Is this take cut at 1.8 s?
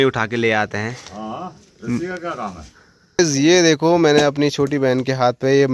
no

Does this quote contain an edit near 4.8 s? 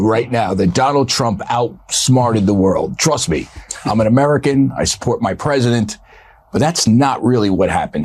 no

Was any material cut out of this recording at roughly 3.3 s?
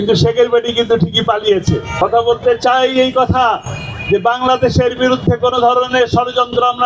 no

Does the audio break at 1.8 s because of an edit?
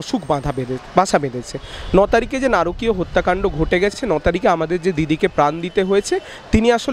no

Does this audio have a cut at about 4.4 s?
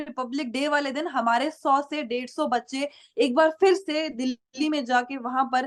no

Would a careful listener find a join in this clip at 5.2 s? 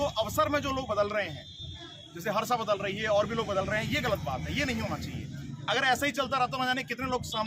no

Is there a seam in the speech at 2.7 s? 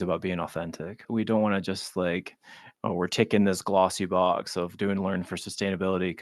no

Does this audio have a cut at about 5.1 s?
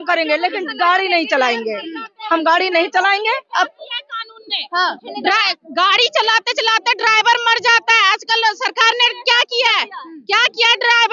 no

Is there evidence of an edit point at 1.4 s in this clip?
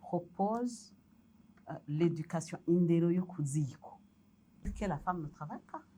no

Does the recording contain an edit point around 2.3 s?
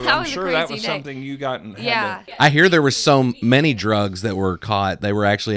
yes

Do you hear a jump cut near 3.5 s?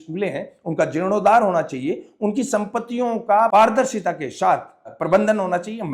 yes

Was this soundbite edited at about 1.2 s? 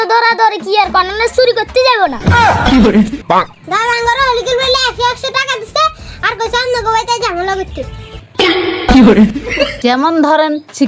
no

